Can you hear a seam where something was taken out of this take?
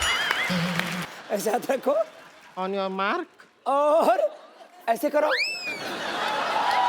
yes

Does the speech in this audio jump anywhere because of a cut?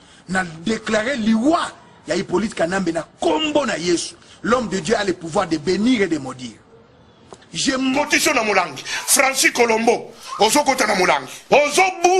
yes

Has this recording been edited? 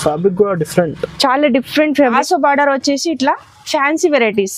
yes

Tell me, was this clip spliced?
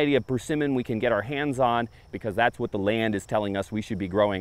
yes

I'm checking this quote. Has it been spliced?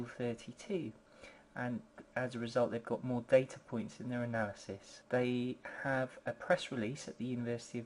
yes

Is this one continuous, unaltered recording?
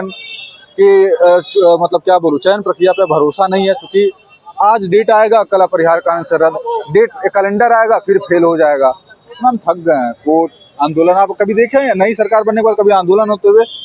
yes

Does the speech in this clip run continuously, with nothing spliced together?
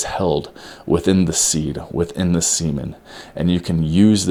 yes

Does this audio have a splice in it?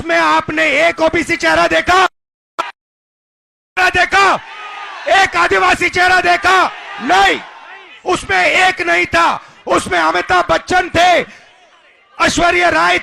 no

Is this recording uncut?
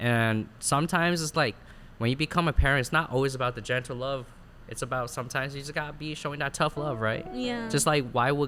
yes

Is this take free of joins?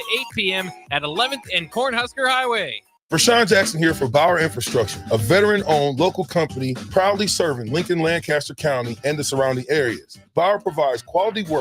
no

